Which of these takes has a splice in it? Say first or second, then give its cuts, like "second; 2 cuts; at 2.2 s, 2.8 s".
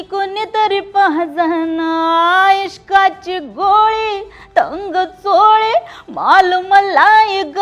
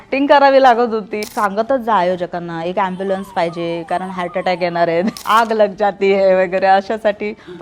second; 2 cuts; at 1.2 s, 5.2 s